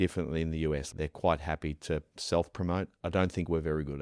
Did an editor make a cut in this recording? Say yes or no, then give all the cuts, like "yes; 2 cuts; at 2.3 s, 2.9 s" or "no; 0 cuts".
yes; 2 cuts; at 0.9 s, 2.1 s